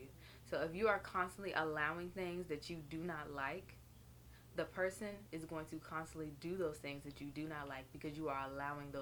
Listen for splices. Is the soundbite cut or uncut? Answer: uncut